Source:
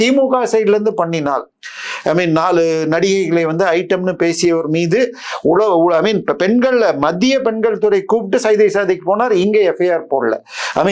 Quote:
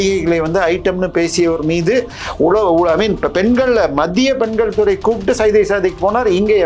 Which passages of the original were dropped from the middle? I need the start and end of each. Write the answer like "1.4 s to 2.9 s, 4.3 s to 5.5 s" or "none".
none